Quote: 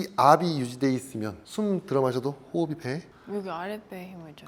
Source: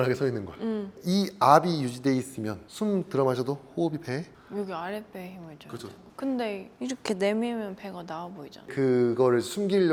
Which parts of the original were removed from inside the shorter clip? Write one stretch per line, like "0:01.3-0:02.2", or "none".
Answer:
none